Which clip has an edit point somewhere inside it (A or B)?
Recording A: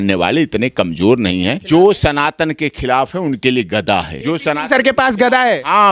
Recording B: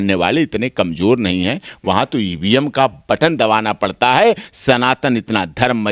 A